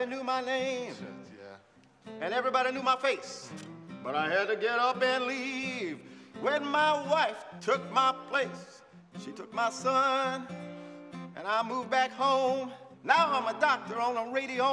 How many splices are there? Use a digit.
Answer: 1